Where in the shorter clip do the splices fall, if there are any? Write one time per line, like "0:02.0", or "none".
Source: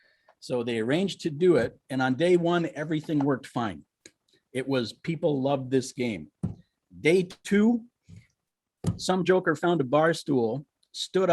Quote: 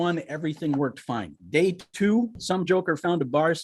0:01.3
0:02.4